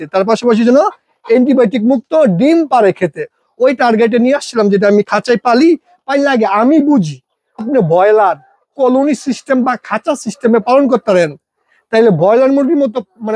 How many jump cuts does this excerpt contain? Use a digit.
1